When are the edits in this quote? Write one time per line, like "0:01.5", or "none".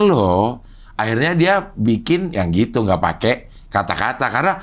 none